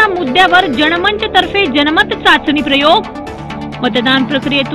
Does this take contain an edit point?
no; 0 cuts

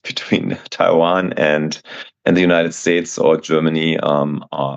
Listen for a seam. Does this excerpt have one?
no; 0 cuts

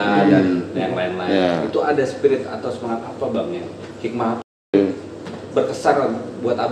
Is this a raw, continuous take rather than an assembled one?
no; 1 cut; at 4.7 s

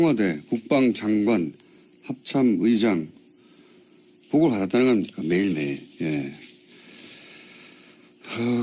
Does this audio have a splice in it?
no; 0 cuts

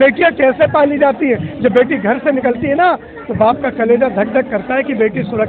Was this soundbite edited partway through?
no; 0 cuts

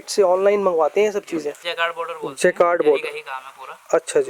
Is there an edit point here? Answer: yes; 1 cut; at 1.6 s

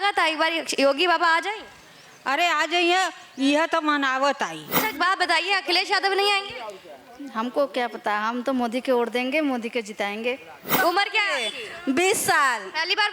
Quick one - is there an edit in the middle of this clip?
yes; 2 cuts; at 4.8 s, 10.7 s

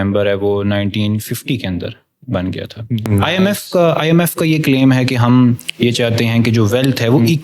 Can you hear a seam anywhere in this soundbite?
yes; 1 cut; at 3.1 s

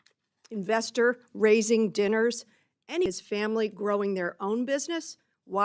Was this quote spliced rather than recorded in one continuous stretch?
yes; 1 cut; at 3.1 s

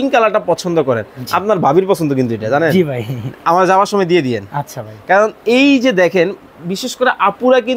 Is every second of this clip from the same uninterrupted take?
yes; 0 cuts

